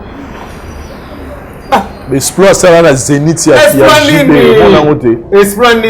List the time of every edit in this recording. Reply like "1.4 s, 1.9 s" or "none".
none